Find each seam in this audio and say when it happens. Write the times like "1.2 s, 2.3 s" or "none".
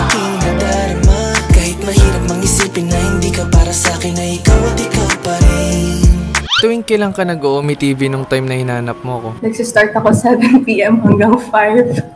6.5 s